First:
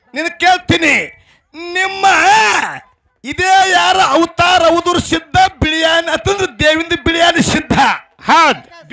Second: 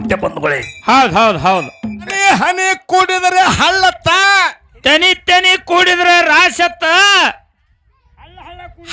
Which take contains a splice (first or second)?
second